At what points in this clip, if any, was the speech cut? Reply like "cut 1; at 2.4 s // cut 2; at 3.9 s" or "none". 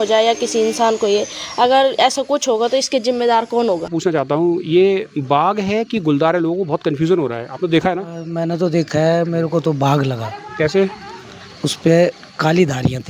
cut 1; at 3.9 s

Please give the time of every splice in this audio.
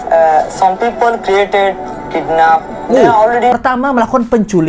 cut 1; at 3.5 s

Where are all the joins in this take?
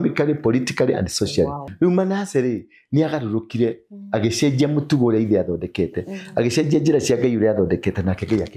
cut 1; at 1.6 s

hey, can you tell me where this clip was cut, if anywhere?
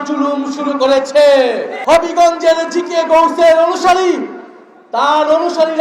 cut 1; at 1.7 s

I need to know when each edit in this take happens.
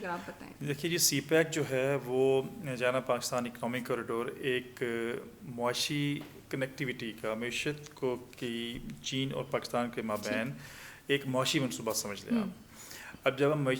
none

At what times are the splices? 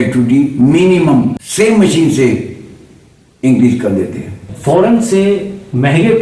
cut 1; at 1.4 s // cut 2; at 4.5 s

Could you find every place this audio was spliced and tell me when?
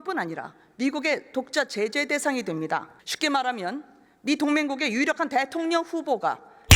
cut 1; at 3.0 s

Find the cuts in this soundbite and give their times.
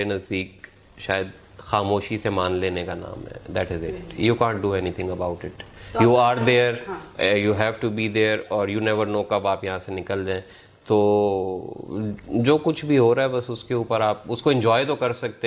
none

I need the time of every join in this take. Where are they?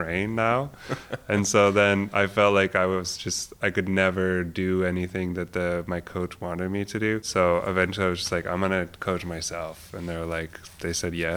cut 1; at 7.3 s

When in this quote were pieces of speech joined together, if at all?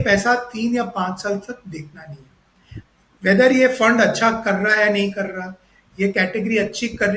none

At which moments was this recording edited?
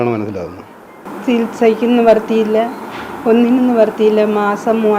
cut 1; at 1.1 s

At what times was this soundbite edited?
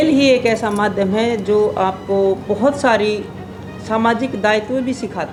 none

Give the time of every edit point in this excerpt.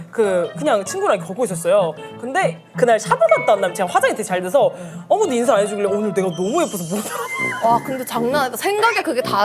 cut 1; at 2.6 s

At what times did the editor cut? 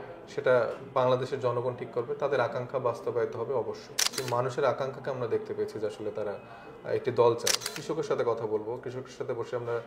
cut 1; at 4.2 s // cut 2; at 7.6 s

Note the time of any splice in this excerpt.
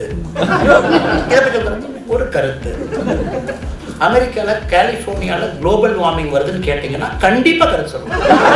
none

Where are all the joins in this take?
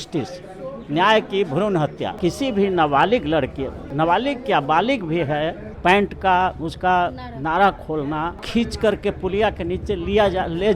cut 1; at 2.1 s // cut 2; at 3.8 s // cut 3; at 5.7 s // cut 4; at 8.4 s

